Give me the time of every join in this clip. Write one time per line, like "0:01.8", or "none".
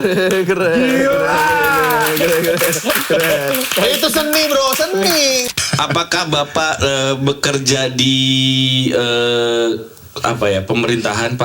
0:05.4